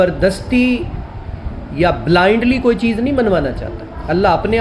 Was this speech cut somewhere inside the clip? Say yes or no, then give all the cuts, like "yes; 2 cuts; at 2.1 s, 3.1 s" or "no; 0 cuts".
no; 0 cuts